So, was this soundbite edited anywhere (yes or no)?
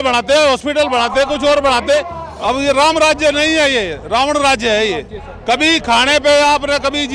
yes